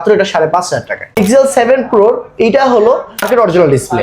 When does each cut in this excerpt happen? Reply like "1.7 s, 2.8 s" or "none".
1.2 s, 3.2 s